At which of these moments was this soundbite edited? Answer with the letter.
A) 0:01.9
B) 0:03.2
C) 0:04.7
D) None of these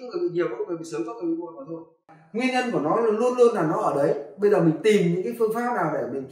A